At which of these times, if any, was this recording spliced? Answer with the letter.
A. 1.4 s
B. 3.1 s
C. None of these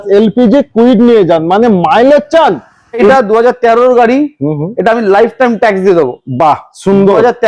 B